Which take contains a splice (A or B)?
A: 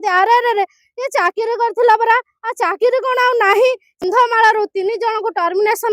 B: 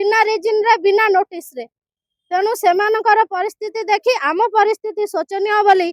A